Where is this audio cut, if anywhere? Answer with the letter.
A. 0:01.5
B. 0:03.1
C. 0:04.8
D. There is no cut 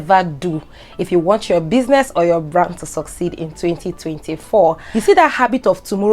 C